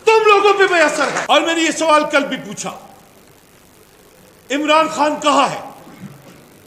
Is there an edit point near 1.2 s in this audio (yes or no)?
yes